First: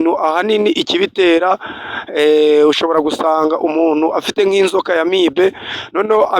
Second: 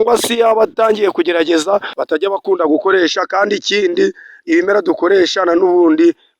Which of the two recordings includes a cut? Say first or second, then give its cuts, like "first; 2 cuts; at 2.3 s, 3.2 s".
second; 1 cut; at 1.9 s